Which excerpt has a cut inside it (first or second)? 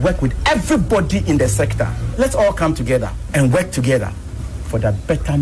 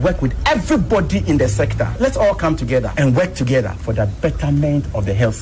second